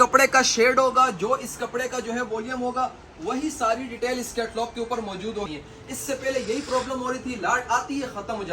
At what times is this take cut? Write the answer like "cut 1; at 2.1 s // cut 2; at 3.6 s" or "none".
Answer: cut 1; at 5.5 s